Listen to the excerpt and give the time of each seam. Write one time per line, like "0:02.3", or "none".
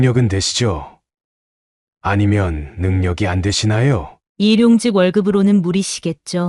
0:04.2